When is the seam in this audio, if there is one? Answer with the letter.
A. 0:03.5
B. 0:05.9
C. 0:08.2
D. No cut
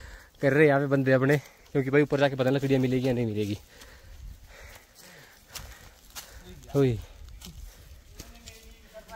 D